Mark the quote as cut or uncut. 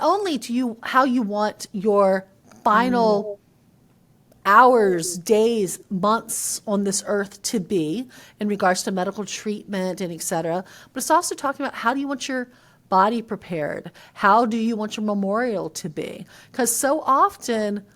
uncut